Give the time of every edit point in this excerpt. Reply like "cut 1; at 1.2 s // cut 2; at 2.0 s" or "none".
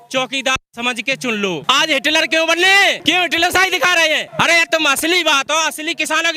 cut 1; at 1.6 s // cut 2; at 3.0 s // cut 3; at 4.3 s